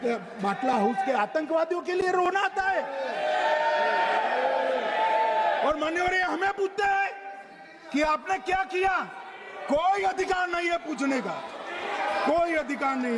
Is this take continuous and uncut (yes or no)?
yes